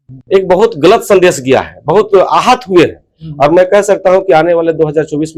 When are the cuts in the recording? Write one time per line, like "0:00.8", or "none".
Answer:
none